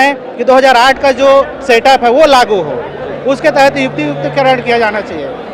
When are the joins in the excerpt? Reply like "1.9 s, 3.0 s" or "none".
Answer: none